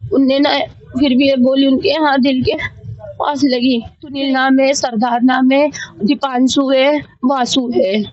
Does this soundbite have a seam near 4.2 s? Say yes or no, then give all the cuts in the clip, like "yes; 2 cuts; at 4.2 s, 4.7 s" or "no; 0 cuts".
yes; 1 cut; at 4.2 s